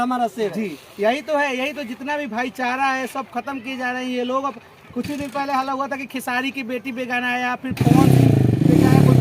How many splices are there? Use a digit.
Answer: 0